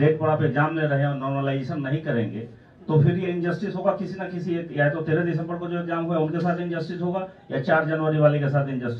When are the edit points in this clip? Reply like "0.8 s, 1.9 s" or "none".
none